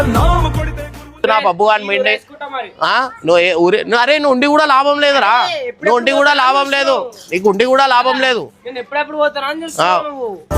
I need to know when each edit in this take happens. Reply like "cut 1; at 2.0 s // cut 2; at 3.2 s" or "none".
cut 1; at 1.2 s